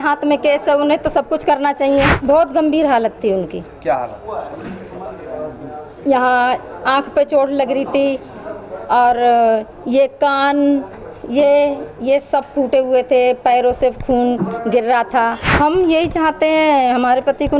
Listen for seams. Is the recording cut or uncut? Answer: cut